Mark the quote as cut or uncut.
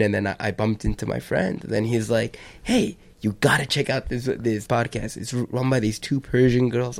cut